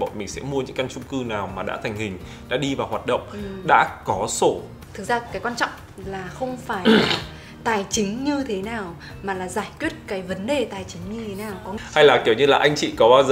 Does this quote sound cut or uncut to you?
cut